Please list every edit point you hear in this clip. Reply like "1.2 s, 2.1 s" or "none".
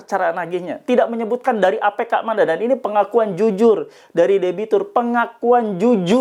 none